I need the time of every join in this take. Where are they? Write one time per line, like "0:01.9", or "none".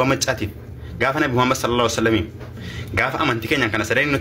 none